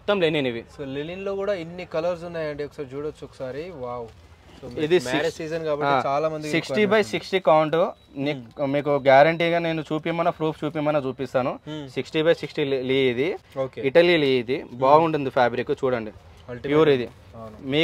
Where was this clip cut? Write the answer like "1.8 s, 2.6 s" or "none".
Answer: none